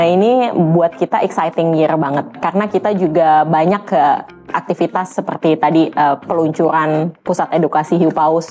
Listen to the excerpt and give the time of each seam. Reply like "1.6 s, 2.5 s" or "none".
2.4 s